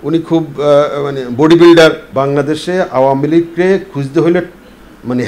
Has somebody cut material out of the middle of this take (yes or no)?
yes